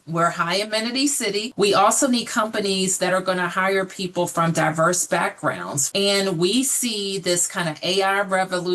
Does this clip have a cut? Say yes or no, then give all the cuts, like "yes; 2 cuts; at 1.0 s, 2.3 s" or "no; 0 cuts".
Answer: yes; 2 cuts; at 1.5 s, 5.7 s